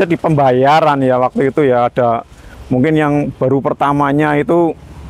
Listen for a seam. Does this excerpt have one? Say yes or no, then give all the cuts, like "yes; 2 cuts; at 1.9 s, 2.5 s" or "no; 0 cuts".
no; 0 cuts